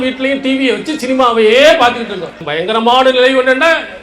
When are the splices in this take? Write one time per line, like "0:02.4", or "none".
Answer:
0:02.4